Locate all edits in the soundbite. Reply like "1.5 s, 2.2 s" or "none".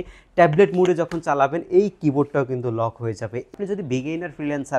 3.5 s